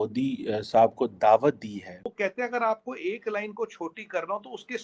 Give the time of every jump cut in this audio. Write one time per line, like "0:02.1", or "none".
0:02.1